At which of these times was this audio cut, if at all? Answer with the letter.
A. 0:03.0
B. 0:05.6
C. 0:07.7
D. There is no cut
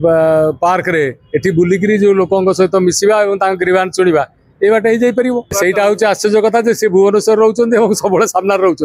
B